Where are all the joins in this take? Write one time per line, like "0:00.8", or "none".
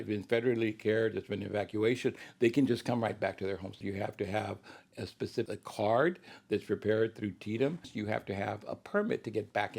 0:03.8
0:05.5
0:07.9